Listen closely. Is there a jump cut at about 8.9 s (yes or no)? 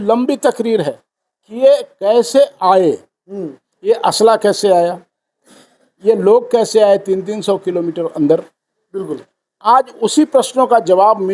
no